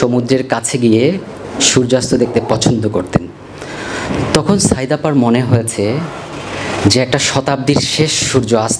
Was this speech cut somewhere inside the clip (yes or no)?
no